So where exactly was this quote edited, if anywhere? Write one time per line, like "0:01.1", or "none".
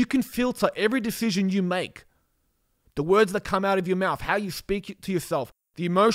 none